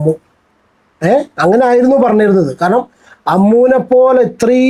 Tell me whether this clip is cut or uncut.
uncut